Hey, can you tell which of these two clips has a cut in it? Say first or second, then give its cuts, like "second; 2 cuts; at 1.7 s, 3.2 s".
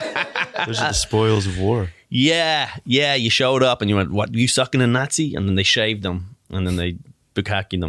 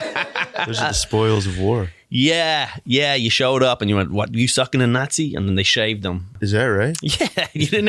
second; 1 cut; at 6.3 s